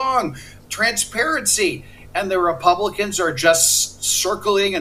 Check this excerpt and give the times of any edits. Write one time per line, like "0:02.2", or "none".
none